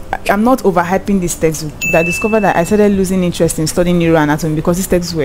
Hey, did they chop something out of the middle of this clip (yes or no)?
yes